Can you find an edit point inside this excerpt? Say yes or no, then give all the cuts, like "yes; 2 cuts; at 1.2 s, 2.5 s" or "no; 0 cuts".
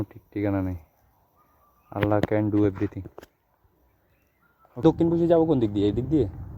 yes; 1 cut; at 4.8 s